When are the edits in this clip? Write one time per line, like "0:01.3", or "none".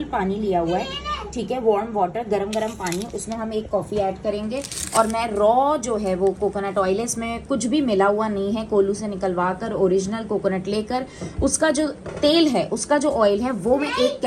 none